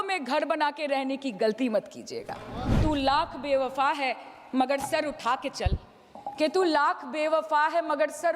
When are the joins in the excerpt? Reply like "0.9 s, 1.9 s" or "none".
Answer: 2.8 s